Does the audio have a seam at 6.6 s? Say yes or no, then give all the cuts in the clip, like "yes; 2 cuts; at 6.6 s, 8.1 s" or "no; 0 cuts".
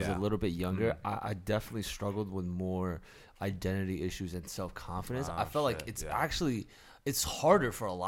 no; 0 cuts